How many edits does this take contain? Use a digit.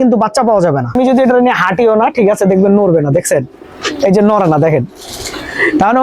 1